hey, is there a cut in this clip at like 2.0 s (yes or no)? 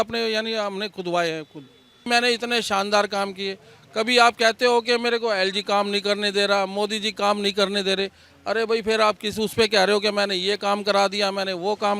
yes